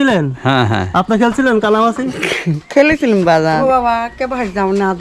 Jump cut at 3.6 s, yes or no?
yes